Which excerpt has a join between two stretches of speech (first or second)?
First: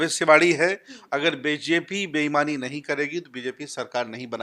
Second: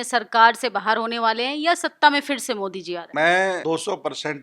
second